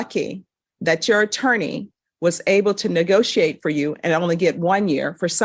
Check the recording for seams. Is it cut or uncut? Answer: uncut